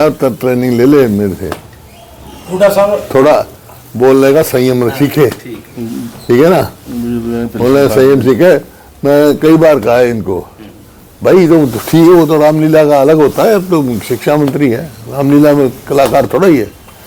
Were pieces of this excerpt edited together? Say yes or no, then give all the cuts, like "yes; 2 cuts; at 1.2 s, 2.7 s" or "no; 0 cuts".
no; 0 cuts